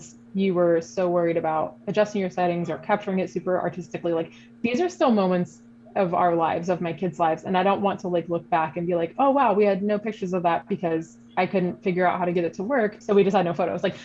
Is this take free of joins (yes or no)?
no